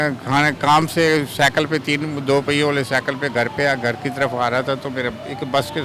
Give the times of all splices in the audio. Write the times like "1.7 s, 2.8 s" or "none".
none